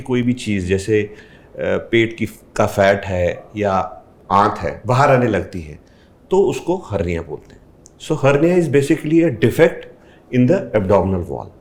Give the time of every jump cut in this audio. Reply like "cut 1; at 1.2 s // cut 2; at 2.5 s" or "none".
none